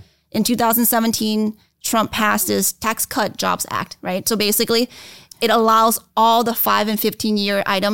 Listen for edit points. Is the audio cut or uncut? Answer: cut